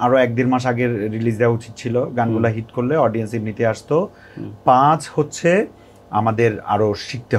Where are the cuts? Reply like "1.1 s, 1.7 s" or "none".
none